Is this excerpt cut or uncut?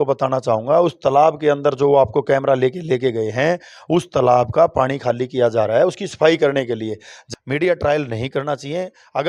cut